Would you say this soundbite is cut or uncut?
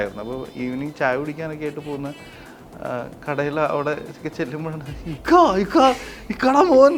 uncut